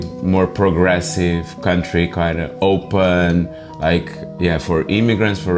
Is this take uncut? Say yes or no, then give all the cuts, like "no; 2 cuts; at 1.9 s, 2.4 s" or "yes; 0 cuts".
yes; 0 cuts